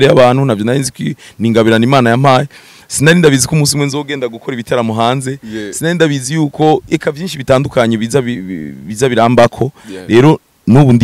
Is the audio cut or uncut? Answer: uncut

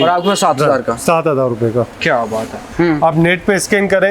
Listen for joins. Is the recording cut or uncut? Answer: cut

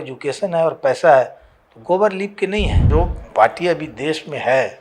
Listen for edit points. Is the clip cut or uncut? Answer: cut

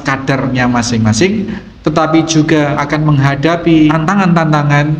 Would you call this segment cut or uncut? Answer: cut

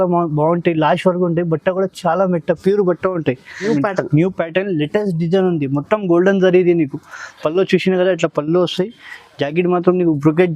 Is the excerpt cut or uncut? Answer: cut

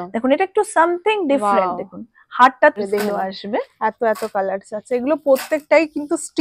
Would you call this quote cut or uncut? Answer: cut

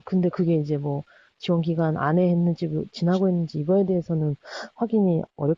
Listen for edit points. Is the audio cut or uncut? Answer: cut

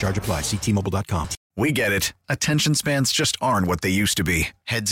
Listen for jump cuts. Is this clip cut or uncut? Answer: cut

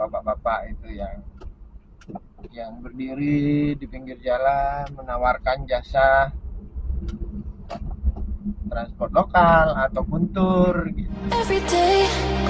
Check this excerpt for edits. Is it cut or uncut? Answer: cut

